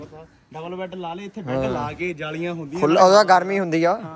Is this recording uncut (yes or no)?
yes